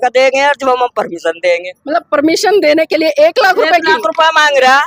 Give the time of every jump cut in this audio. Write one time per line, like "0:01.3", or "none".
none